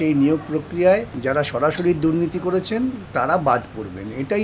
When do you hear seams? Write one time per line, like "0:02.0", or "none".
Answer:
0:01.1
0:03.0